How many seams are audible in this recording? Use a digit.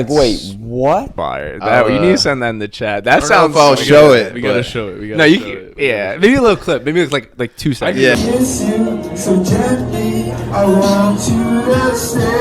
2